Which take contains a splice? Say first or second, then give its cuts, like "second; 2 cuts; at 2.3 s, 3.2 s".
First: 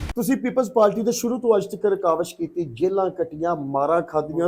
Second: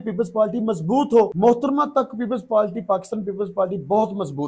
second; 1 cut; at 1.3 s